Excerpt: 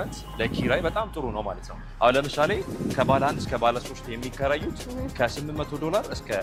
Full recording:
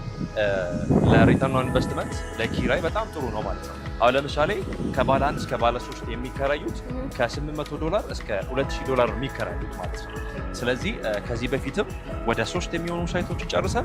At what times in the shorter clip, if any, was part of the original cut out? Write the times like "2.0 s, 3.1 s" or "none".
none